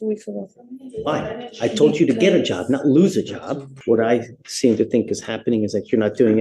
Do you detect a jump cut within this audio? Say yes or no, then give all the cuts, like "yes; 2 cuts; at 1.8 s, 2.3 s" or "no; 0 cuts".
yes; 1 cut; at 3.7 s